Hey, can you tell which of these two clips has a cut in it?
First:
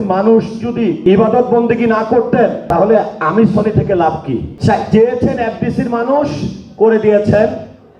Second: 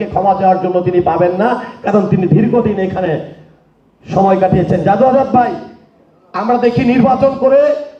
first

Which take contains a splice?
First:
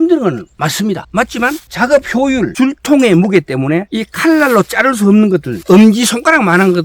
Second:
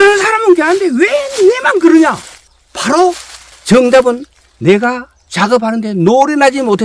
first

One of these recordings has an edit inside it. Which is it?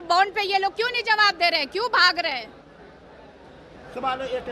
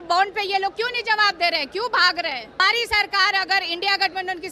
second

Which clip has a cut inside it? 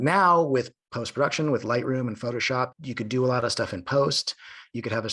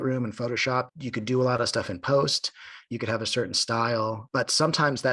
second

